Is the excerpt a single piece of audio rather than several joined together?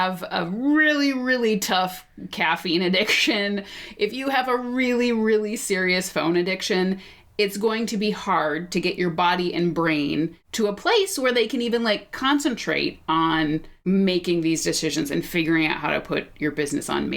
no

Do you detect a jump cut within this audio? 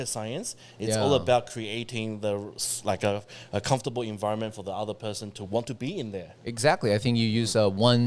no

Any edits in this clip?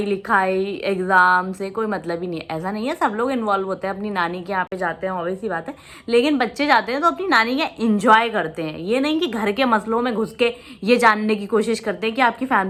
no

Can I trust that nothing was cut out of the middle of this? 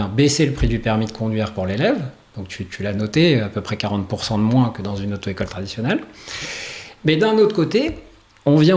yes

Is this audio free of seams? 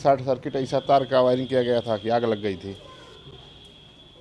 yes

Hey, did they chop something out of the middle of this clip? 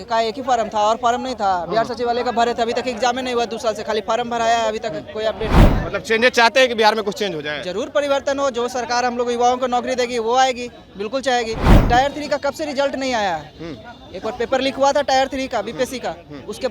yes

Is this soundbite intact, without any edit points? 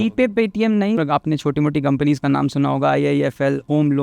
no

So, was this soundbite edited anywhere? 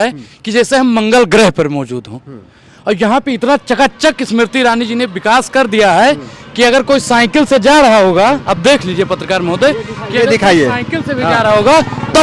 no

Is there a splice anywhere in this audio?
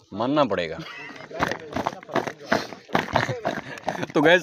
yes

